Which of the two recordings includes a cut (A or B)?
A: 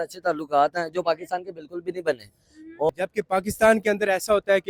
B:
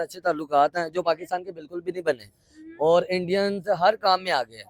A